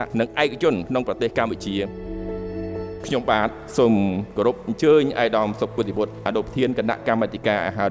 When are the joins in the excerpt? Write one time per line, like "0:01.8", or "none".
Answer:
none